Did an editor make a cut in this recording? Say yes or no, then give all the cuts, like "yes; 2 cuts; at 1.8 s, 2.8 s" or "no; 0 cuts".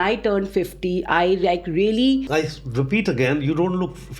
yes; 1 cut; at 2.2 s